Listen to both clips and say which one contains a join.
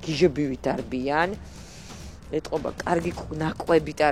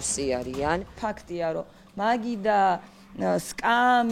second; 1 cut; at 1.0 s

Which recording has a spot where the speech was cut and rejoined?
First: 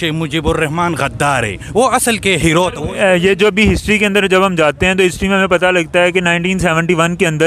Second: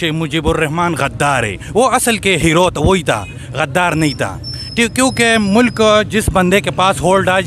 first; 1 cut; at 2.8 s

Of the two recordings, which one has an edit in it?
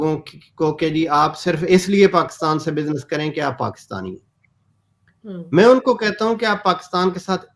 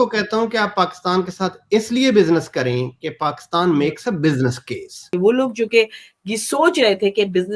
second; 1 cut; at 5.1 s

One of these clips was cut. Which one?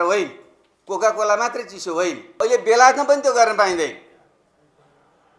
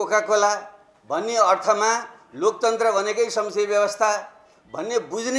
first; 1 cut; at 2.2 s

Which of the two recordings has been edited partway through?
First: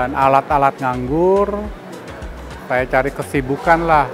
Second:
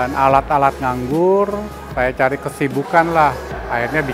second; 1 cut; at 1.8 s

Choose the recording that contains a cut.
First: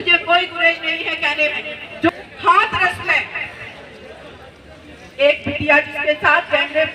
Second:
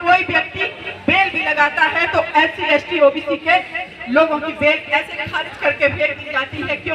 first; 1 cut; at 2.1 s

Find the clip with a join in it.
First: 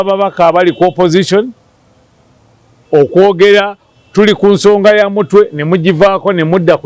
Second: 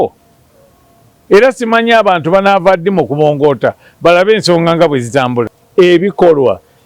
second; 1 cut; at 5.6 s

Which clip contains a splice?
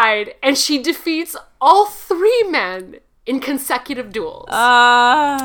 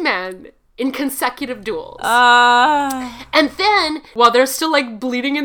second; 1 cut; at 4.1 s

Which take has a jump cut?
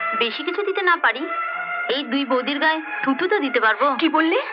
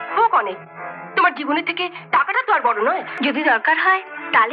second; 1 cut; at 3.1 s

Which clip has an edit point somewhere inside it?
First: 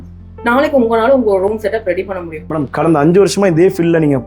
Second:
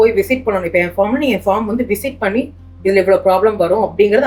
first; 1 cut; at 2.3 s

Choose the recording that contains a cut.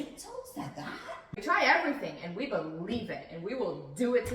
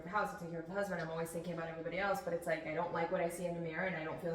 first; 1 cut; at 1.4 s

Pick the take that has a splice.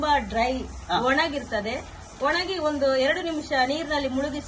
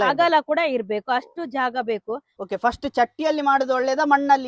second; 1 cut; at 2.3 s

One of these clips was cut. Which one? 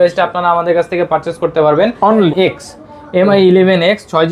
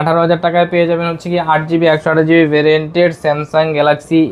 first; 1 cut; at 2.3 s

